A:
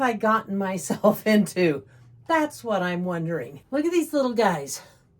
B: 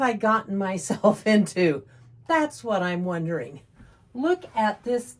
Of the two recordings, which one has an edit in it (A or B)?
A